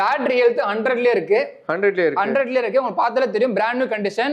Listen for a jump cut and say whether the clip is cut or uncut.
uncut